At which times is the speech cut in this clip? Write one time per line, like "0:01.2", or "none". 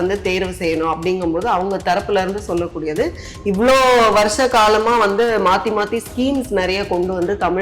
none